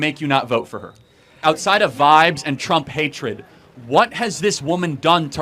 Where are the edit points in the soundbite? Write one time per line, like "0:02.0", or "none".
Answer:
0:01.4